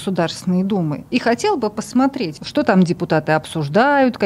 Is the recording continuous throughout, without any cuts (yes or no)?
no